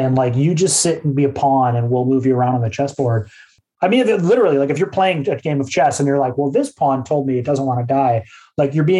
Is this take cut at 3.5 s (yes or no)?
yes